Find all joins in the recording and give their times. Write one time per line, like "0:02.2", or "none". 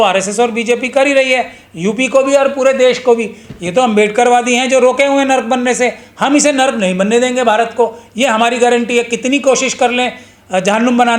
none